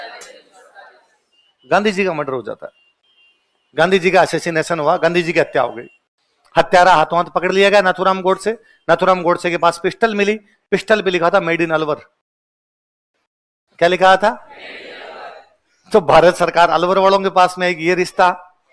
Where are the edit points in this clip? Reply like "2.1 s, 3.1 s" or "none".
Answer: none